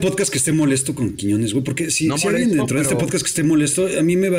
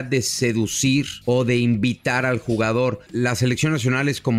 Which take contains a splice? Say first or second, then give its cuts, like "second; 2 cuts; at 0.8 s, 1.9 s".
second; 2 cuts; at 1.1 s, 3.0 s